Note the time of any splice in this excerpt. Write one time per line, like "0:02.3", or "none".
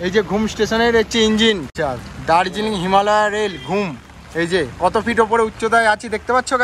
none